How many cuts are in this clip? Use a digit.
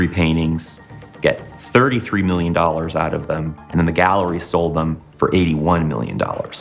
1